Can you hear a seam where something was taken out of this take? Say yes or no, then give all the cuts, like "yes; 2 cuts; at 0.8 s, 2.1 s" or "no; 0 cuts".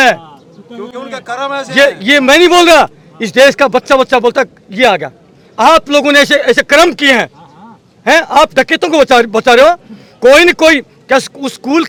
no; 0 cuts